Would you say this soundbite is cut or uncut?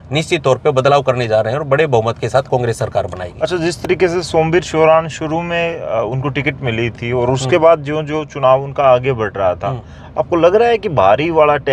uncut